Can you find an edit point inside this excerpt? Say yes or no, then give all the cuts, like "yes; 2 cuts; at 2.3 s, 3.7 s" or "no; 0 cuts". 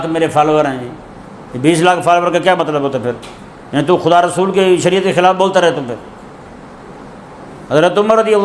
no; 0 cuts